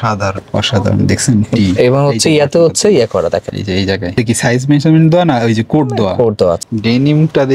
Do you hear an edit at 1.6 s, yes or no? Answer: no